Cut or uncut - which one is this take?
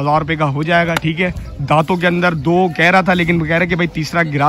uncut